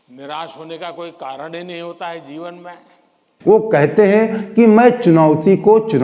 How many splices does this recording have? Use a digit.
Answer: 1